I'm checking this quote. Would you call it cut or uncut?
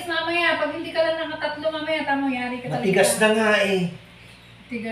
uncut